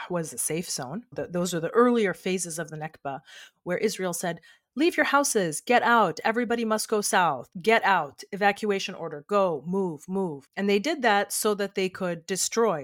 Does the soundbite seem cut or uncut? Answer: uncut